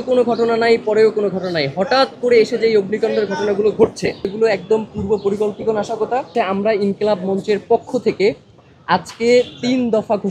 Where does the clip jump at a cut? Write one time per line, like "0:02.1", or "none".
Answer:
0:04.3
0:06.3